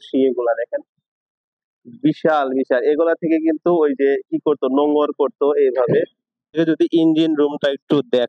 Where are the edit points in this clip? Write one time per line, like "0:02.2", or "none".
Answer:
0:06.5